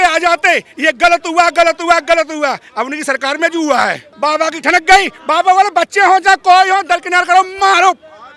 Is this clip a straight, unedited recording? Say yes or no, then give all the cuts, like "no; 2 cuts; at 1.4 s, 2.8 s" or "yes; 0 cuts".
no; 1 cut; at 4.1 s